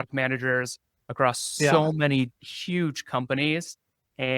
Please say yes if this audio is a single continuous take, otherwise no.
yes